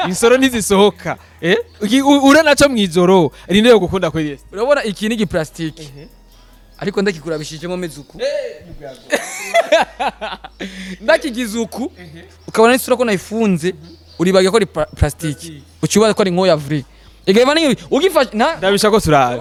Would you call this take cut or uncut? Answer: uncut